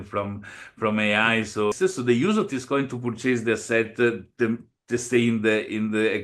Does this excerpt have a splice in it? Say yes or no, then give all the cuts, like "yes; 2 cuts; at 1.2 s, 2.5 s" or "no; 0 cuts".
yes; 1 cut; at 1.8 s